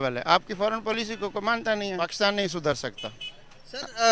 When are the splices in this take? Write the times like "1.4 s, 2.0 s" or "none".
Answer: 2.1 s